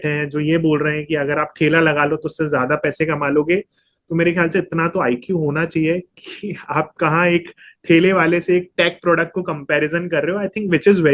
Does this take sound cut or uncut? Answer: uncut